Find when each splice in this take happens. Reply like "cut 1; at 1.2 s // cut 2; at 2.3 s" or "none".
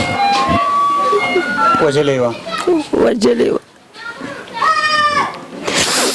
none